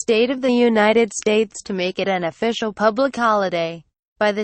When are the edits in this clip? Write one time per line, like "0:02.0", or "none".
0:02.1